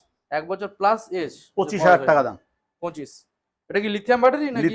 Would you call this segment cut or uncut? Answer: uncut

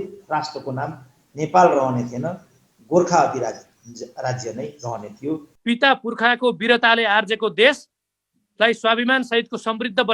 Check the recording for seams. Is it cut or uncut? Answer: cut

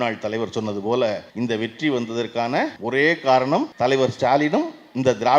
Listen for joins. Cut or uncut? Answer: cut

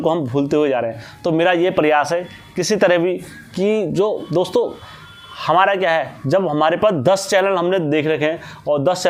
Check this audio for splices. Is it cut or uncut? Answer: uncut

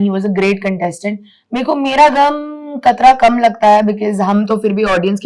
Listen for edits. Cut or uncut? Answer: uncut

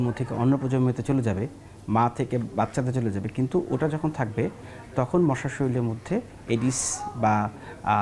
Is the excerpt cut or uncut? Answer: uncut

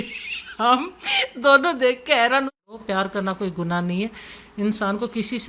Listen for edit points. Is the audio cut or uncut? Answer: cut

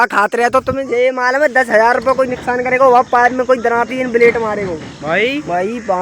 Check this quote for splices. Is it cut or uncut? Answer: uncut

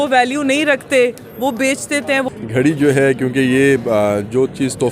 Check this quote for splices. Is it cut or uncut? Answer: cut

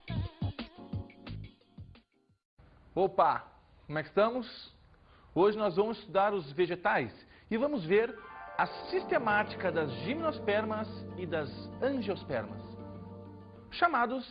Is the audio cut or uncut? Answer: cut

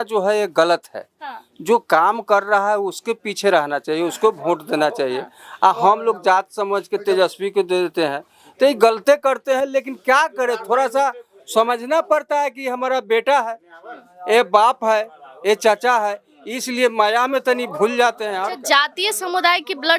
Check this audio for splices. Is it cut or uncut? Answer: uncut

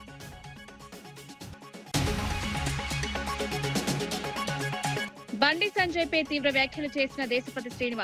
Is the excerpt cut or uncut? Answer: uncut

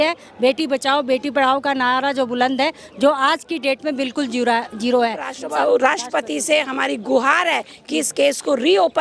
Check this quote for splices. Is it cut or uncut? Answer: cut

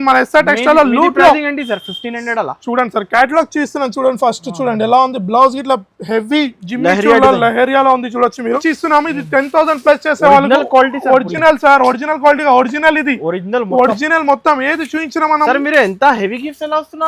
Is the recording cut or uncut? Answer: cut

